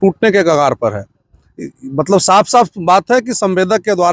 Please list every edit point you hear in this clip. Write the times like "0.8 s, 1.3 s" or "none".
none